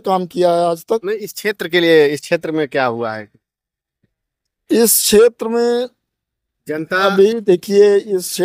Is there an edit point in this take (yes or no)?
no